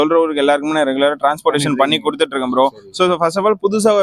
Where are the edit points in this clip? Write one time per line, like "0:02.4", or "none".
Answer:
none